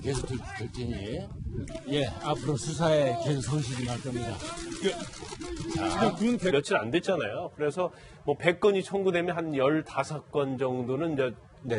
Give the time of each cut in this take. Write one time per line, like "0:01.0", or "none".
none